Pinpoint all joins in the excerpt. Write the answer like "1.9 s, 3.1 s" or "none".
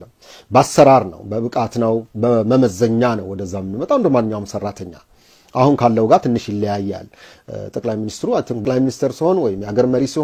8.6 s

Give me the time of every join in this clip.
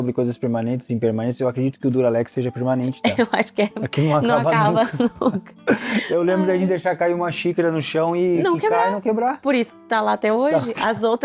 none

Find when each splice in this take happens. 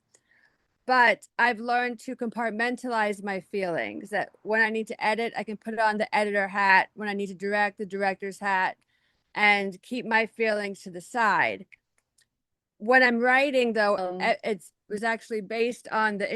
14.8 s

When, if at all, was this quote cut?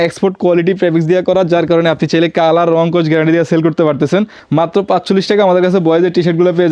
4.4 s

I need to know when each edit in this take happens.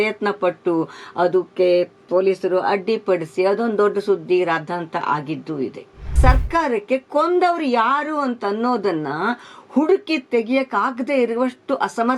6.2 s

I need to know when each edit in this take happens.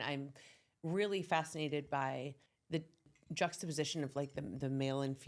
2.9 s

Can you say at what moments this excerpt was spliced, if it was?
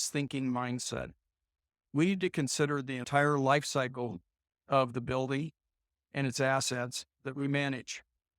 3.0 s

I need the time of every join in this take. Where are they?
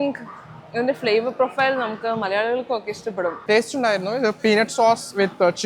3.4 s

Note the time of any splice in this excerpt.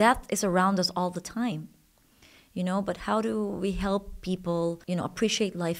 4.8 s

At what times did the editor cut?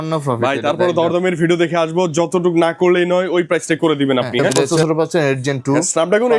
4.7 s

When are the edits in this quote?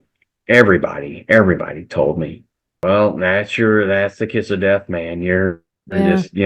2.7 s

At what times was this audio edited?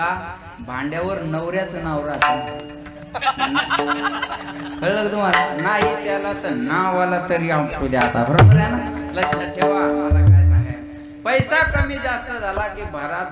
none

